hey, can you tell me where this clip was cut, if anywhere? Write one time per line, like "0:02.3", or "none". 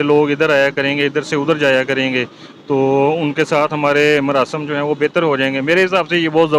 none